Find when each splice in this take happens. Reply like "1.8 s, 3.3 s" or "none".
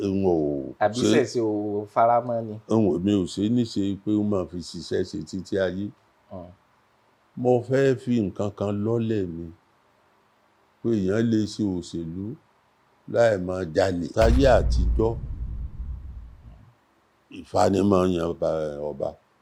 14.1 s